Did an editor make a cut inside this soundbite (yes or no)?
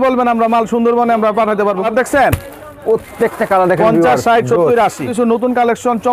yes